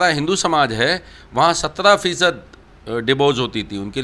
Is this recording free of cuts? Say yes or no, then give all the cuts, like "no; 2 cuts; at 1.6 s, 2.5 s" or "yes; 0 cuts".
yes; 0 cuts